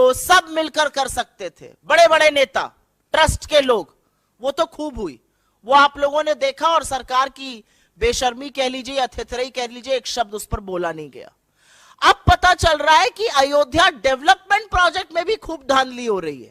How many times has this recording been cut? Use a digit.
0